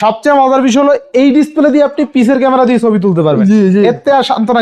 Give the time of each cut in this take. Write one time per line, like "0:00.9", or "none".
none